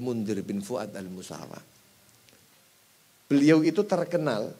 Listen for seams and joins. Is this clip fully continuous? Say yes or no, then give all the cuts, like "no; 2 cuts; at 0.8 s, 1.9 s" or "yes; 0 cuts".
no; 1 cut; at 2.4 s